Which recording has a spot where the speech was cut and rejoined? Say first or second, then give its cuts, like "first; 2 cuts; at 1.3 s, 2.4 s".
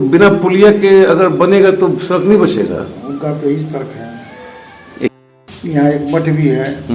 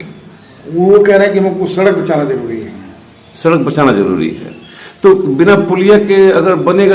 first; 1 cut; at 5.1 s